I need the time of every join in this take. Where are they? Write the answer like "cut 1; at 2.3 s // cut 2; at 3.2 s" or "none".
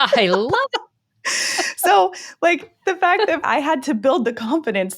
cut 1; at 3.4 s